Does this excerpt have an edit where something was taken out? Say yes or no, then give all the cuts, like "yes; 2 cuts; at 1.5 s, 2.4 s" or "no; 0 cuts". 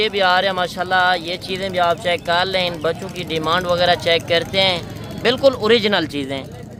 no; 0 cuts